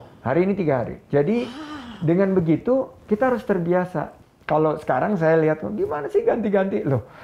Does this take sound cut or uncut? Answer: cut